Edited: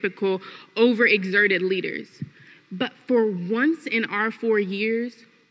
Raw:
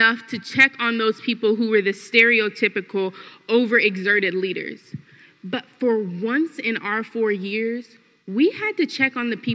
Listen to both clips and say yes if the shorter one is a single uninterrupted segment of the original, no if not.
yes